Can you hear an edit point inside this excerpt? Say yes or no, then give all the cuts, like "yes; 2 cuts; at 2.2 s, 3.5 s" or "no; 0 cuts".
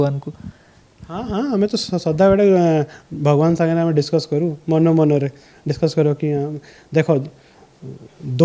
no; 0 cuts